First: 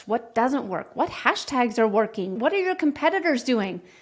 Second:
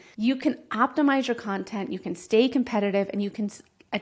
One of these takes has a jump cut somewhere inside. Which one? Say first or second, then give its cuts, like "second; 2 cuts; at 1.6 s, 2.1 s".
first; 1 cut; at 2.3 s